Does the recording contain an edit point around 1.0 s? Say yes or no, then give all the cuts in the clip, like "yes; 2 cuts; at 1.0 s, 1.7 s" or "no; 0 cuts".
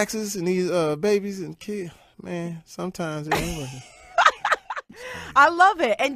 yes; 1 cut; at 1.0 s